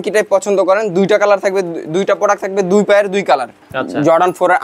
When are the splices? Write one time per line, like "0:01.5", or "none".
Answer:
0:03.6